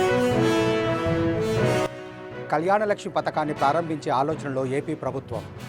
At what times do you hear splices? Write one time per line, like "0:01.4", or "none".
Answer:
0:01.9

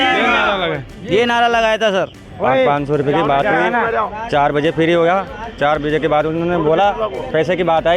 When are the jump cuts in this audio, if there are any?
0:02.3

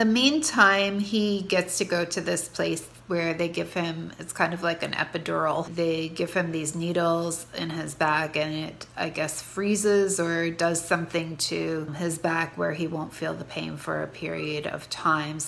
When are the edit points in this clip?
0:05.7
0:11.9

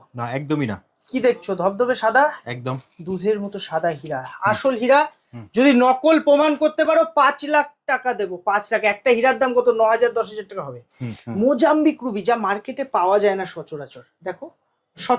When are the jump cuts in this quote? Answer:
0:11.0

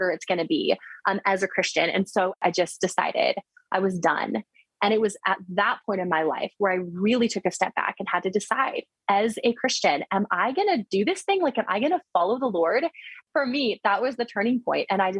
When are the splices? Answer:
0:02.4
0:04.6
0:13.1

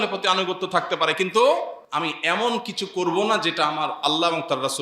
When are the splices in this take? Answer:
0:01.8

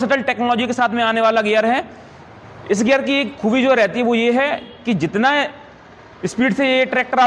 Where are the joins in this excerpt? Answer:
none

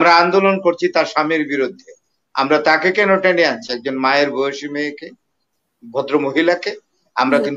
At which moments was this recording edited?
none

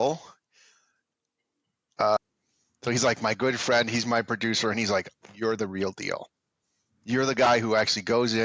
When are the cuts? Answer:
0:02.2

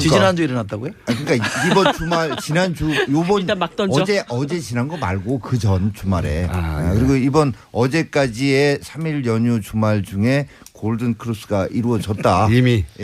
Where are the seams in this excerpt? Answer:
none

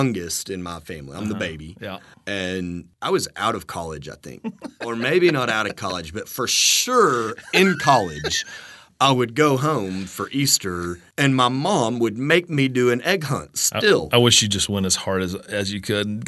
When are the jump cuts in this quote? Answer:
0:02.1
0:02.9
0:04.8
0:11.0

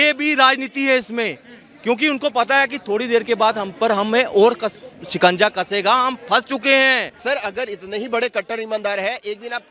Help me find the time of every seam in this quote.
0:07.1

